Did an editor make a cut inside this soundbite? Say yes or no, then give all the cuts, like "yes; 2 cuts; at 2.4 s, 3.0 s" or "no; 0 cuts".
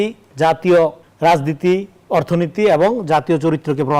yes; 1 cut; at 1.1 s